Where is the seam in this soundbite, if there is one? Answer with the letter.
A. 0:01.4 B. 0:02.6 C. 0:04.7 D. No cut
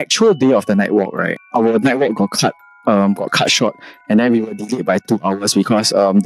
A